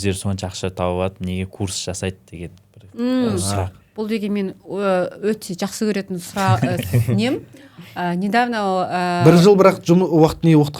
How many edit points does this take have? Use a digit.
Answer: 0